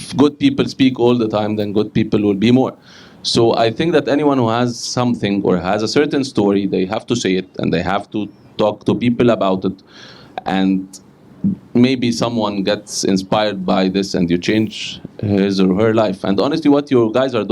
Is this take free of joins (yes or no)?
yes